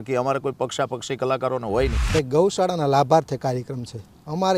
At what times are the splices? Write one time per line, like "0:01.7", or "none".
0:02.0